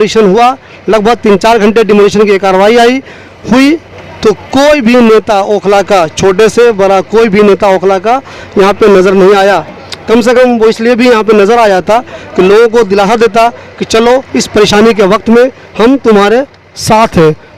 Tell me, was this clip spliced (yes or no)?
no